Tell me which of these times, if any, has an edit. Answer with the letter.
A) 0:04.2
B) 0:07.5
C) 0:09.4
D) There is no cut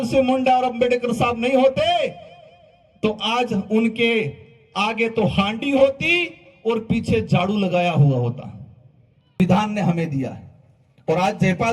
C